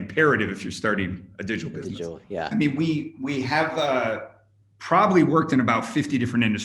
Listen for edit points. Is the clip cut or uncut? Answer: cut